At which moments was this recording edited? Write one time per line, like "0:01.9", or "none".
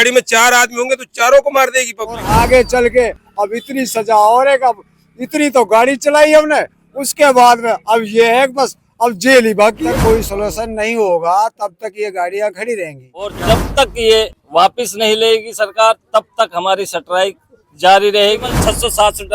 0:02.2
0:09.8
0:13.4
0:18.5